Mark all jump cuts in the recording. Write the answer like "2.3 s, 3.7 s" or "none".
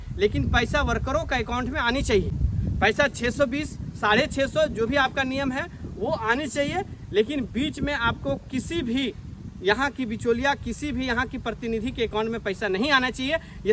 none

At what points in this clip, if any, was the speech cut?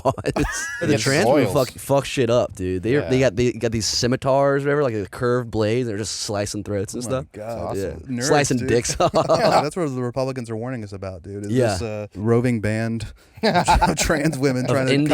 0.9 s, 9.6 s, 12.1 s

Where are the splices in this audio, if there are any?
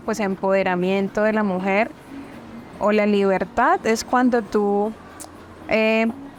none

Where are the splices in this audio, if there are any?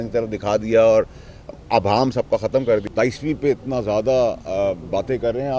2.8 s

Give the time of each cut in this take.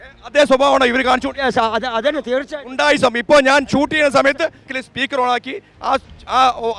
4.8 s

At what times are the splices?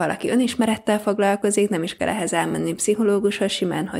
none

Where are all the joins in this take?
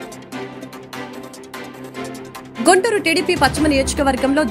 1.3 s

